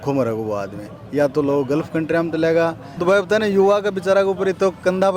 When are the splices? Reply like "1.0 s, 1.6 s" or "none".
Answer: 2.9 s